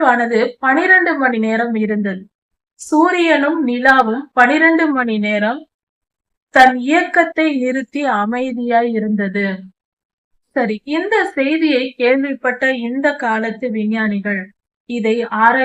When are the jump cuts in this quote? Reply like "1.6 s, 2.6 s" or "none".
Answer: none